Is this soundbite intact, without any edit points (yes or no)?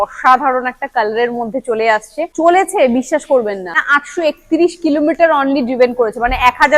no